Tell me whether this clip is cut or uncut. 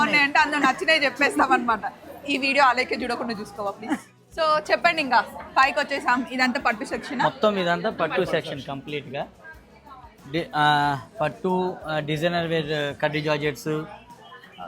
cut